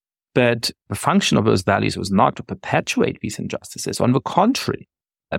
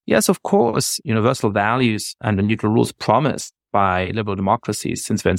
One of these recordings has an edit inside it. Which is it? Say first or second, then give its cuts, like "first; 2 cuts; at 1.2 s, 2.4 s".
second; 2 cuts; at 0.9 s, 2.1 s